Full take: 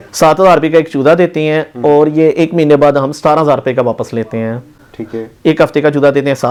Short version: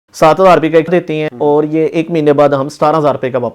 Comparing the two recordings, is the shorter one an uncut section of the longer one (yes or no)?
no